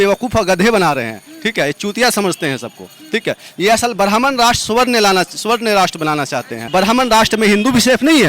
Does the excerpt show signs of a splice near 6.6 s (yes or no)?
yes